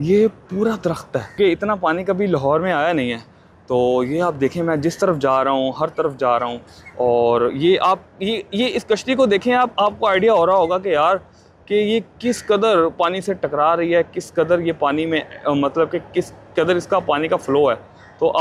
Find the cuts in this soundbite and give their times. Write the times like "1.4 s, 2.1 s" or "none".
1.4 s